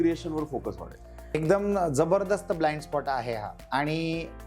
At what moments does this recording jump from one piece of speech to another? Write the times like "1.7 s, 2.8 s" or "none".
1.3 s, 3.5 s